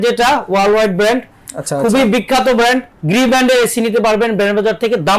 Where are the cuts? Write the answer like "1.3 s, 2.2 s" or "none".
2.9 s